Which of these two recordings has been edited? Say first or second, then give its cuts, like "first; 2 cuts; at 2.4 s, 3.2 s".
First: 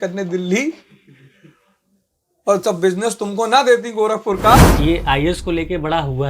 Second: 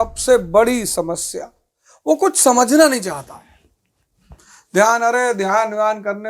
first; 1 cut; at 4.6 s